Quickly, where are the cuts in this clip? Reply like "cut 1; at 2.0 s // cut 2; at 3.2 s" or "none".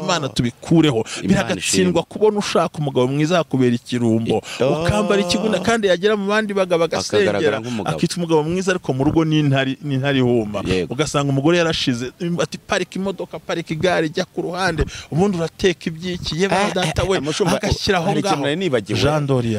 none